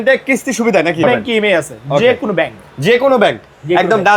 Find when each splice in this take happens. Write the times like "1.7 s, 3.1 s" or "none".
1.0 s